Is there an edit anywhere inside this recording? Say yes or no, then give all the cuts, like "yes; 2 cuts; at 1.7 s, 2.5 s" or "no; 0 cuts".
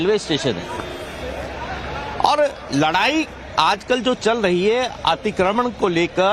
no; 0 cuts